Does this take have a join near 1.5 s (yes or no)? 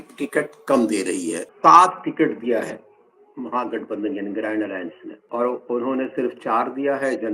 yes